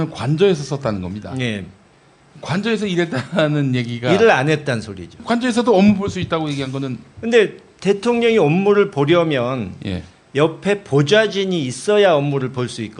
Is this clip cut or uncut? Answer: uncut